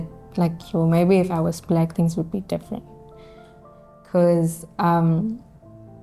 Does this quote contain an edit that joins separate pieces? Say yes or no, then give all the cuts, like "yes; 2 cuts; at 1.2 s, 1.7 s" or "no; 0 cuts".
no; 0 cuts